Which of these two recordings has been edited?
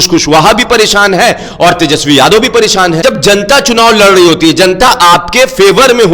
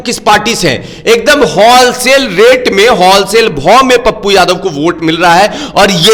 first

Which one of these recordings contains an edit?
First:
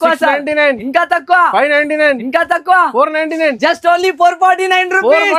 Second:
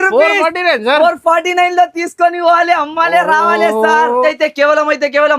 second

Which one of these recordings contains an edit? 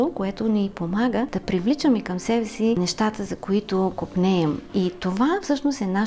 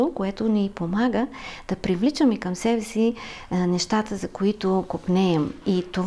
first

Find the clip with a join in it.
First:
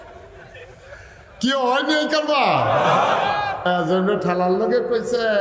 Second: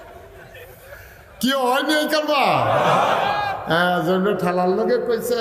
first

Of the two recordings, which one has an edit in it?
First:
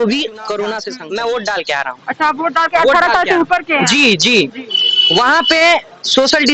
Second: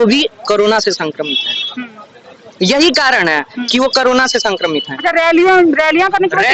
first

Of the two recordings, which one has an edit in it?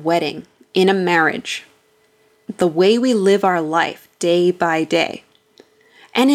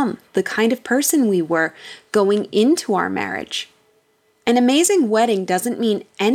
first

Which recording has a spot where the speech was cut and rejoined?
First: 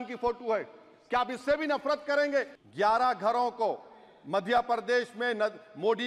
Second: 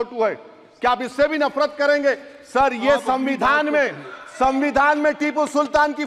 first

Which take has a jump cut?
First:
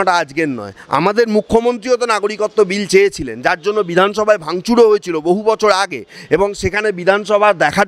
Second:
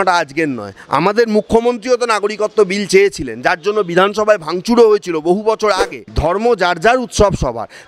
second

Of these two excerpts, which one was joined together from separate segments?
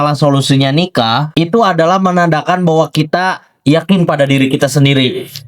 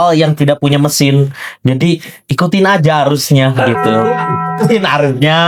first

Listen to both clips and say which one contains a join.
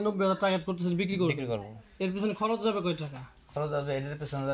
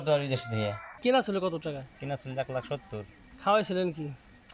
second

